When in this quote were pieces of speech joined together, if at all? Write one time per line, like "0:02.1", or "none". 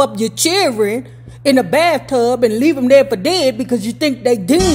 none